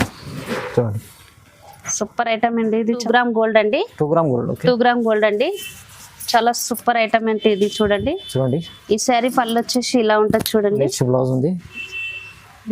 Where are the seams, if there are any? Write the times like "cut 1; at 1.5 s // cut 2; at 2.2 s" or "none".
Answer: cut 1; at 3.0 s